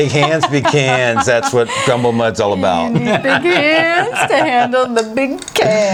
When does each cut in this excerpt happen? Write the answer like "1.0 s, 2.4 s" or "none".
none